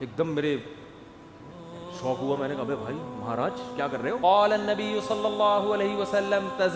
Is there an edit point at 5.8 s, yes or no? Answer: no